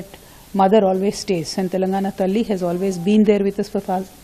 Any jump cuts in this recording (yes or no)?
no